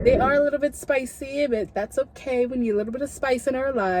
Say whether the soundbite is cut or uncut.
uncut